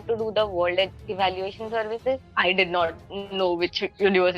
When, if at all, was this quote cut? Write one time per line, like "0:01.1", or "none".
0:02.3